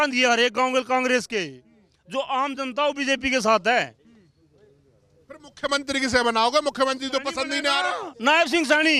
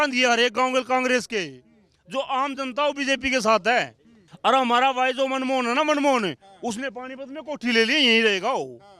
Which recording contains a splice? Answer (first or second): second